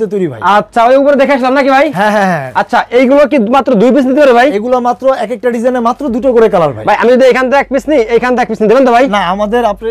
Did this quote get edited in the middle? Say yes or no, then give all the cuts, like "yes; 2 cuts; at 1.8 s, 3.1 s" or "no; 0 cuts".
no; 0 cuts